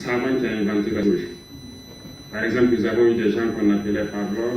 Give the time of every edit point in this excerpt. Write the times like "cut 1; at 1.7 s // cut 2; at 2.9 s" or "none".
cut 1; at 1.0 s

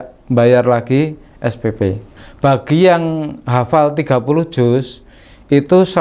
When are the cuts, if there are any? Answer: cut 1; at 2.1 s

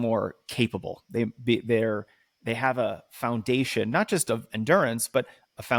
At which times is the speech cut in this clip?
none

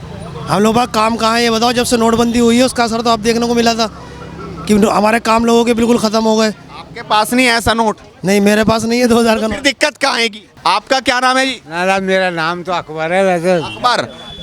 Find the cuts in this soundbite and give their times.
cut 1; at 10.5 s

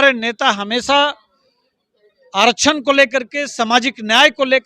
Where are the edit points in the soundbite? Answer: none

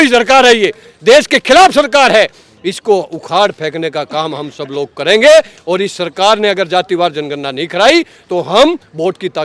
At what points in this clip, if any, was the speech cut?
none

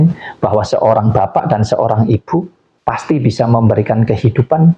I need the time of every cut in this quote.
cut 1; at 2.6 s

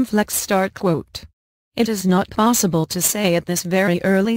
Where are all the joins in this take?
cut 1; at 1.8 s

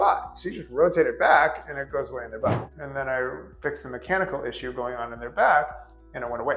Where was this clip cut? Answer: cut 1; at 2.6 s

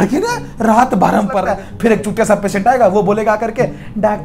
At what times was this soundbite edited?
cut 1; at 1.4 s

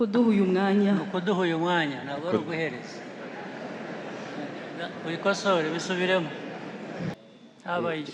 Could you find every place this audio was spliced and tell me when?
cut 1; at 7.1 s

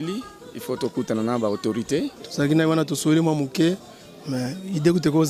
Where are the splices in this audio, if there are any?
cut 1; at 2.2 s

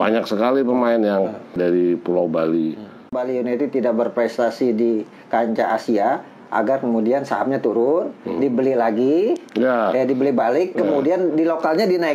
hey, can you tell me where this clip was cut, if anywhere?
cut 1; at 1.6 s // cut 2; at 3.1 s

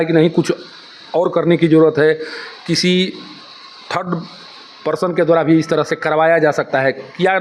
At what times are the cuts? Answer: none

